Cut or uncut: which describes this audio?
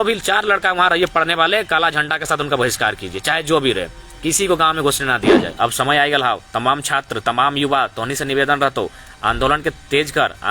cut